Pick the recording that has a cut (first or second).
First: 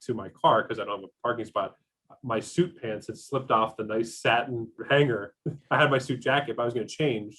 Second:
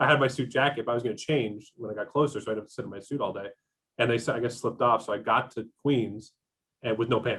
first